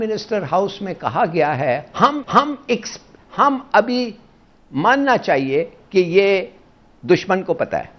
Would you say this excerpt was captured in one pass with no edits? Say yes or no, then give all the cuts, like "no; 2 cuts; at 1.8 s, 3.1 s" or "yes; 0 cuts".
yes; 0 cuts